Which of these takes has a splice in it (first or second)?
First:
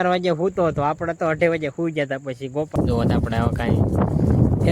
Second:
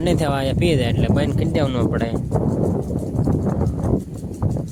first